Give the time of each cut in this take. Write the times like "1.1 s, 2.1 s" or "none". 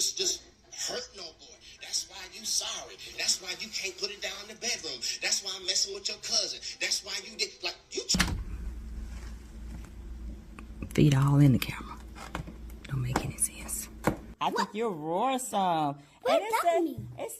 8.2 s, 14.3 s